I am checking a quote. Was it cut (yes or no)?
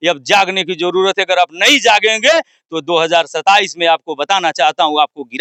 no